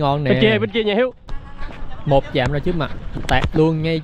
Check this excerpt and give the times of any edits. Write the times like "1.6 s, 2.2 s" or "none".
1.3 s